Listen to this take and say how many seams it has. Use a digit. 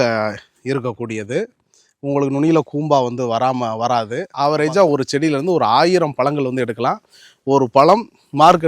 1